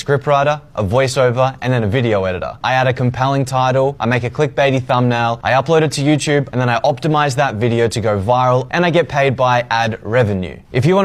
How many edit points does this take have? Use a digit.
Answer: 0